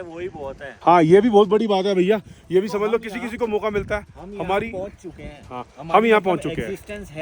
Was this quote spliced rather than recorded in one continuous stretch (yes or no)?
no